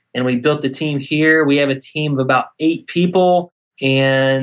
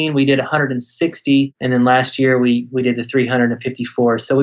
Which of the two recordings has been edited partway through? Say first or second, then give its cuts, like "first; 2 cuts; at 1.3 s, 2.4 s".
second; 1 cut; at 1.6 s